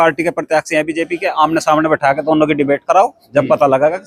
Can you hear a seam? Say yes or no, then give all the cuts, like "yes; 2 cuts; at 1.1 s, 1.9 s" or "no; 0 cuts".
no; 0 cuts